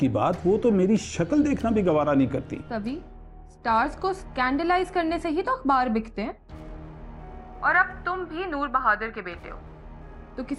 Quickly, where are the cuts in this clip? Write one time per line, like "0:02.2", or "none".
0:02.6